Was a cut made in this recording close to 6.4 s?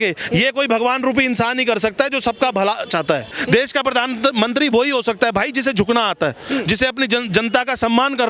no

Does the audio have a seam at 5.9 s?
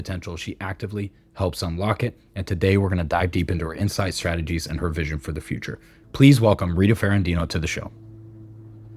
yes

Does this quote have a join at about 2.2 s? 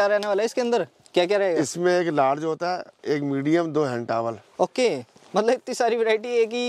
no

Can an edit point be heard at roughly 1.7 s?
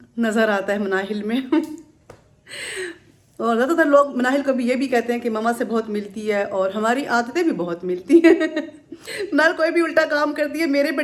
no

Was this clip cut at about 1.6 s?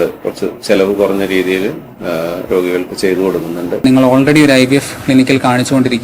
no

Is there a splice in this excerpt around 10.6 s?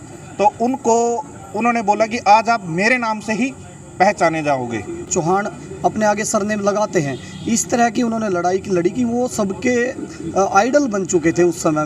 no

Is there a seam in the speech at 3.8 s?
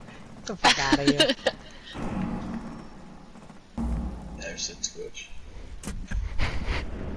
yes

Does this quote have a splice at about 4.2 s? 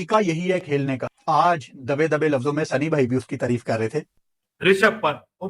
yes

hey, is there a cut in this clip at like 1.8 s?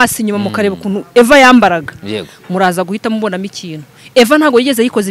no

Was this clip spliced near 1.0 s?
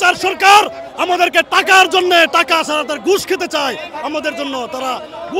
no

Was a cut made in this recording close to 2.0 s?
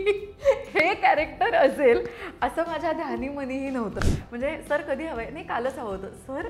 no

